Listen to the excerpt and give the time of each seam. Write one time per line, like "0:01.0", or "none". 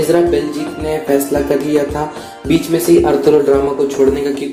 none